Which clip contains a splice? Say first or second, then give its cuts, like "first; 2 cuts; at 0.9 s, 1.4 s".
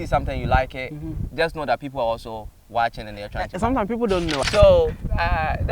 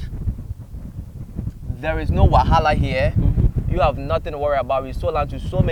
first; 1 cut; at 4.4 s